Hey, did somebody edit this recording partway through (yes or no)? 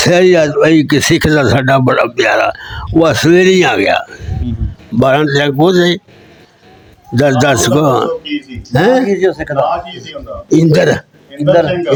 no